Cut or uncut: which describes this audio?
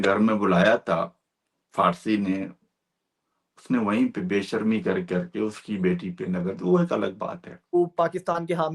cut